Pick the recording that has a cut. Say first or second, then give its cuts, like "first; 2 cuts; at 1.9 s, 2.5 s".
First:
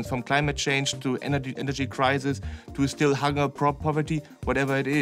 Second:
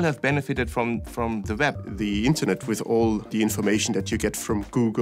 second; 2 cuts; at 1.9 s, 3.3 s